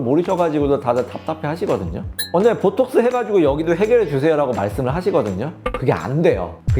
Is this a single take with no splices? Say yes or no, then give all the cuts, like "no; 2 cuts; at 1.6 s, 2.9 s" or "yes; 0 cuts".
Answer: no; 1 cut; at 2.2 s